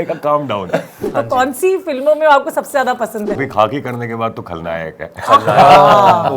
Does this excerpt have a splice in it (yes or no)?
yes